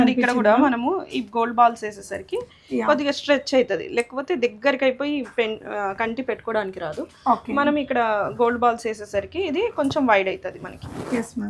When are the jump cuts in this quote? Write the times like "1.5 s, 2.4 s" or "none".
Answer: none